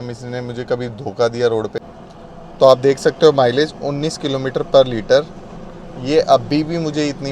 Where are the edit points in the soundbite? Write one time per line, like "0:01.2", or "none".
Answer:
0:01.8